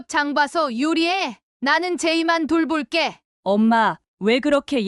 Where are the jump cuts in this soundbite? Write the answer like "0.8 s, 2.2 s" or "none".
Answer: 3.3 s